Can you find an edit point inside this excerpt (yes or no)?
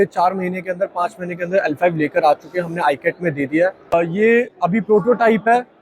yes